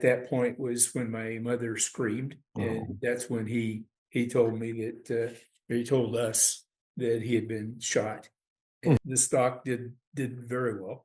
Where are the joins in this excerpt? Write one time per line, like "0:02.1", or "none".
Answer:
0:02.4
0:09.0